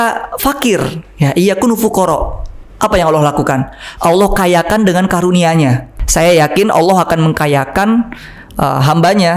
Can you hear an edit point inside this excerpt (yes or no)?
yes